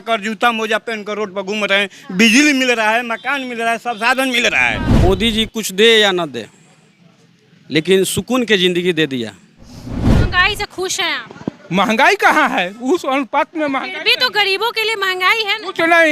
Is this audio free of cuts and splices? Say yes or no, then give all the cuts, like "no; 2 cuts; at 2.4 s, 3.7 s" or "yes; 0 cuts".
no; 2 cuts; at 5.0 s, 10.0 s